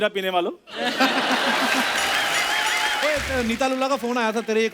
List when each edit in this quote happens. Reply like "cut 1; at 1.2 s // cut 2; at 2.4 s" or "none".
cut 1; at 3.0 s